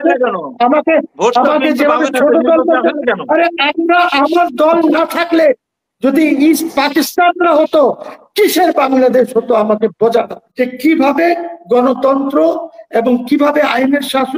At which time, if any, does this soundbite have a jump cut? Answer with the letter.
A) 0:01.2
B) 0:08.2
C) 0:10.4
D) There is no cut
C